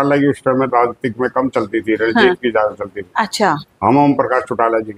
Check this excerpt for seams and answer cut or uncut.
uncut